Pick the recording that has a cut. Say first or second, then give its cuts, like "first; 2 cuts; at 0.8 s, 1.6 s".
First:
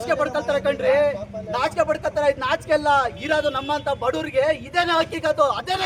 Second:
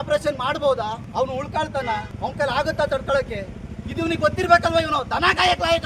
second; 2 cuts; at 1.0 s, 2.1 s